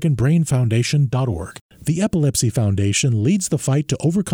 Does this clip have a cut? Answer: yes; 1 cut; at 1.6 s

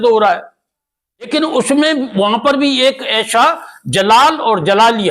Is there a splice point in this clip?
yes; 1 cut; at 1.3 s

